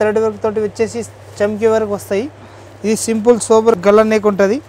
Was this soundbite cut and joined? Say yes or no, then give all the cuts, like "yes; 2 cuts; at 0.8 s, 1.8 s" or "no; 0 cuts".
yes; 1 cut; at 3.8 s